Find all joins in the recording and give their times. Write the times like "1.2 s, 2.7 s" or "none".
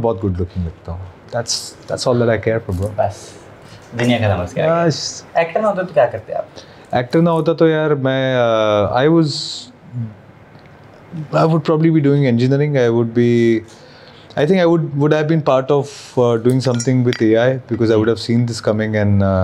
none

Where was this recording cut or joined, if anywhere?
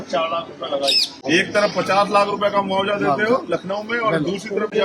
1.2 s

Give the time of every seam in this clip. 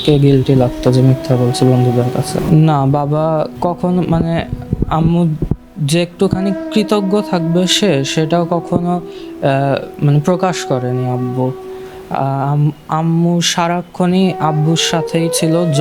2.3 s, 3.5 s

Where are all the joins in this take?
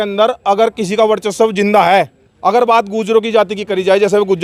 none

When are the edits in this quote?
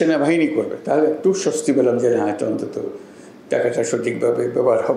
none

